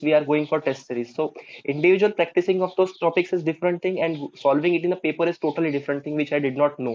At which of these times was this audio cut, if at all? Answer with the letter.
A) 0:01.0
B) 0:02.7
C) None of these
C